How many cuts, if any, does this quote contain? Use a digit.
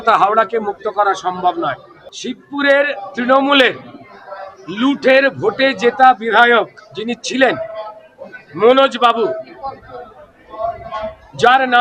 1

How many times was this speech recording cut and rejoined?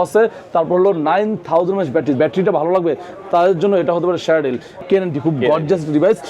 2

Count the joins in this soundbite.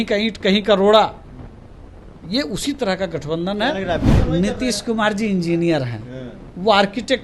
1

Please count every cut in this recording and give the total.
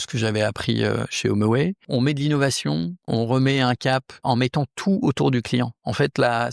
3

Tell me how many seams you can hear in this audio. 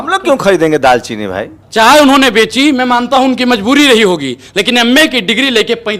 1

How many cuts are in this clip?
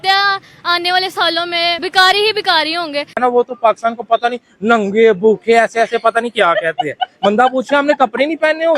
2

